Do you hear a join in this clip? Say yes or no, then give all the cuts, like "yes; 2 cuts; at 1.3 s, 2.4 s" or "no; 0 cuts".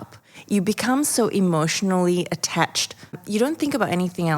yes; 1 cut; at 3.2 s